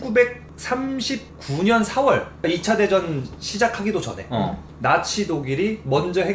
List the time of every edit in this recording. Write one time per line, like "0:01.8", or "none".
0:02.4